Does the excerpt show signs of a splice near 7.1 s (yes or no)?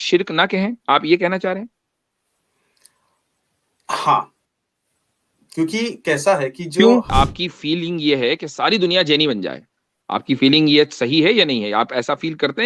yes